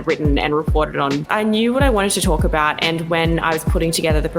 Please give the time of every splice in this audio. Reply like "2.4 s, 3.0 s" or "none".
1.3 s

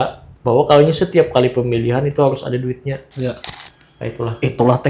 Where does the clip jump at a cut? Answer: 3.5 s

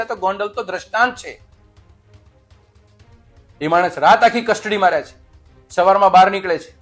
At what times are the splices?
none

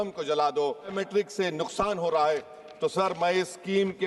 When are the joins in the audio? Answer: 0.9 s

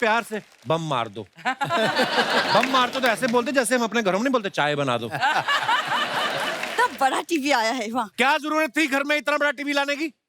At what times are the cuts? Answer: 6.6 s

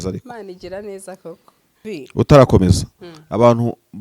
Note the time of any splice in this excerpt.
1.8 s

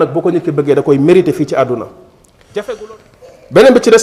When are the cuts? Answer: 2.8 s

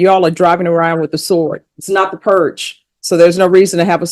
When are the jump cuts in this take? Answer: 1.7 s

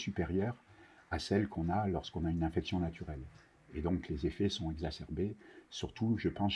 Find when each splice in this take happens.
none

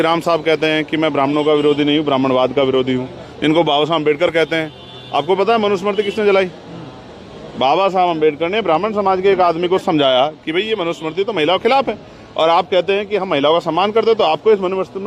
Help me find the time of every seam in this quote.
none

